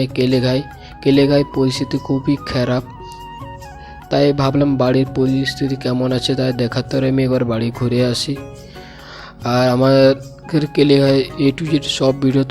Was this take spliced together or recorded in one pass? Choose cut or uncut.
uncut